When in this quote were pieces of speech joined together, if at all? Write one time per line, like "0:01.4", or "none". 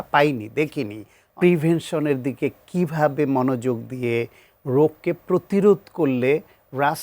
0:01.2